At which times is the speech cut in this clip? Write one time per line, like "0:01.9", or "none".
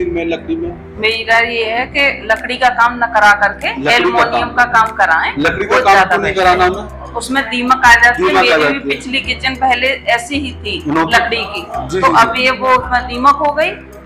none

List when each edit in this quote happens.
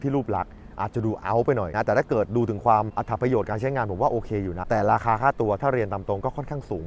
0:01.7
0:03.0
0:04.6

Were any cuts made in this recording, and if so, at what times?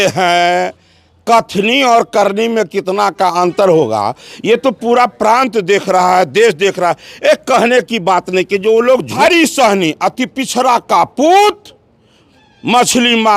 0:09.2

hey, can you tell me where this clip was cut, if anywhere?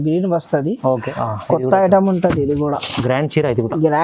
0:01.1

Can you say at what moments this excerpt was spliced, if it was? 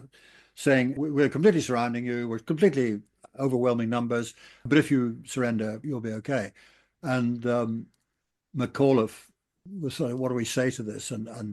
0:00.9

